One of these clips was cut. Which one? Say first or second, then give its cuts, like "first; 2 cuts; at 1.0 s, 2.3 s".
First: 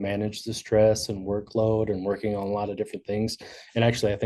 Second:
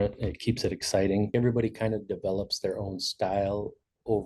second; 1 cut; at 1.3 s